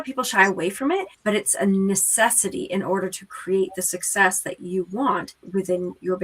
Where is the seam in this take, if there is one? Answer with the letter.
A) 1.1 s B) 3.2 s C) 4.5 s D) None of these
A